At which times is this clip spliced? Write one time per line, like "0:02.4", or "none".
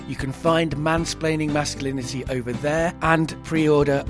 0:03.2